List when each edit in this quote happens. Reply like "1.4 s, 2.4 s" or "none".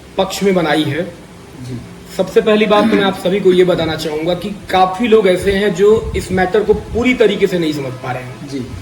none

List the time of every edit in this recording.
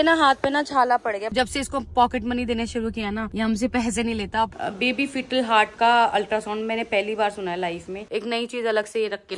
1.3 s, 4.5 s, 8.1 s

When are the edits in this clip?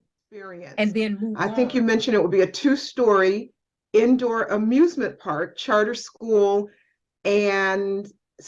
1.4 s

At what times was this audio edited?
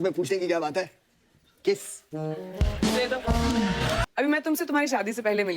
4.1 s

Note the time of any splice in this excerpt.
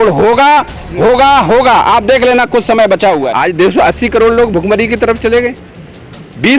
3.3 s

